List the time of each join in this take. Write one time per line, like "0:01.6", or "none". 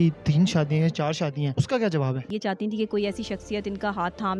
0:01.5
0:02.3